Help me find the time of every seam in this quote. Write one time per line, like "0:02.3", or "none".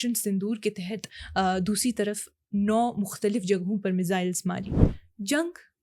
0:04.7